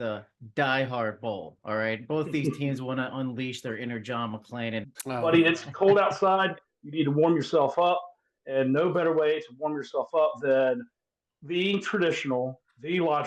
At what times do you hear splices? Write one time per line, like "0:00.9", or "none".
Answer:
0:04.9